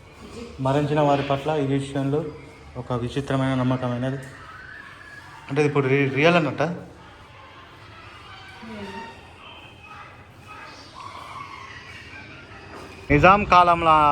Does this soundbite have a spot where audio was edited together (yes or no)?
yes